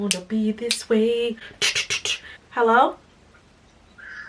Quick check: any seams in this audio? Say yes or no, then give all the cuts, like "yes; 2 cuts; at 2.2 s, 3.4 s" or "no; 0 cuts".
yes; 1 cut; at 2.5 s